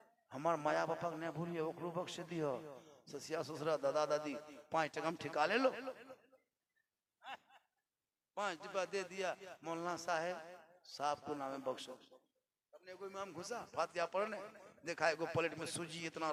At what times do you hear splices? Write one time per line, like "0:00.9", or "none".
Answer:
none